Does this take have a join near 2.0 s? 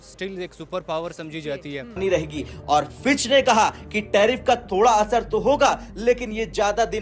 yes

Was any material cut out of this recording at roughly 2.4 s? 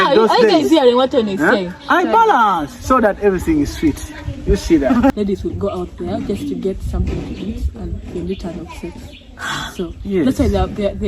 no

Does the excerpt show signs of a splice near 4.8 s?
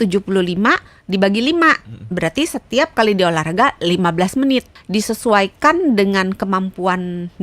yes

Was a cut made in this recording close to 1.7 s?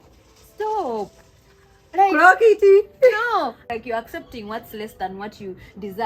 no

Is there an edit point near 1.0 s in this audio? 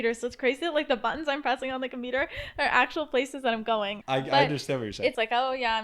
no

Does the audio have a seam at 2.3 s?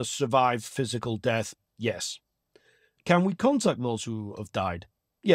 no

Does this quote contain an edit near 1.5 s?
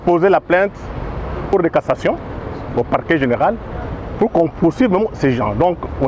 yes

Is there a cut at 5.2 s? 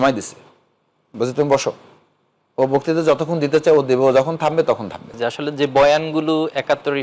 yes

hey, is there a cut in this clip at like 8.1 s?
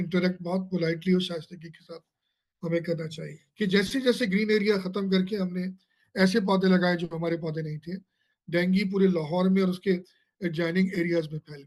no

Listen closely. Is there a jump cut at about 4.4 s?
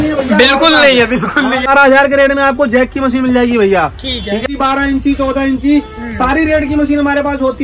yes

